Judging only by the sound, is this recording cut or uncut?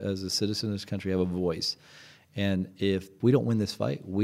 cut